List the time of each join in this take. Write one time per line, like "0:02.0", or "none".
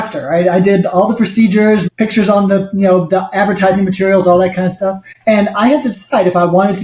0:01.9
0:05.1

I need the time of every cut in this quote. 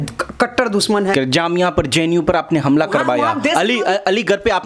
0:01.1

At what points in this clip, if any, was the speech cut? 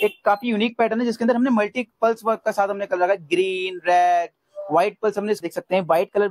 0:05.4

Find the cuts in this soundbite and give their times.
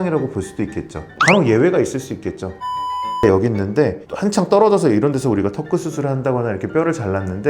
0:01.1

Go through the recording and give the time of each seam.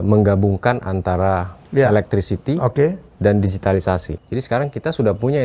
0:04.1

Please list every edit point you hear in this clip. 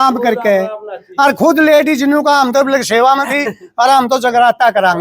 none

